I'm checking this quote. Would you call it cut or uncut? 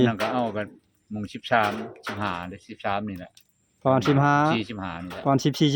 uncut